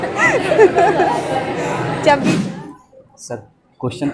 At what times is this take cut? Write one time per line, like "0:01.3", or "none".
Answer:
0:02.4